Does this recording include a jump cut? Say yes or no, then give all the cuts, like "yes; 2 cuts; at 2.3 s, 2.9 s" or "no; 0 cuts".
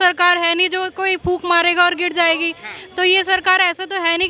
no; 0 cuts